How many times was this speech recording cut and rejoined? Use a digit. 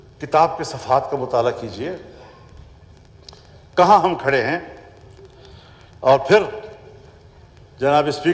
0